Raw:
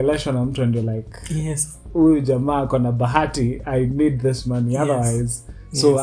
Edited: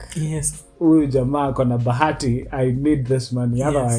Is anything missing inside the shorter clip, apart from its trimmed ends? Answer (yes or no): no